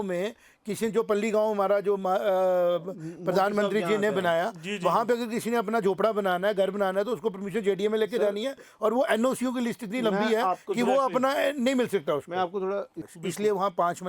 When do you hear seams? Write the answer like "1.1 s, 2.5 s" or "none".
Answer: 13.0 s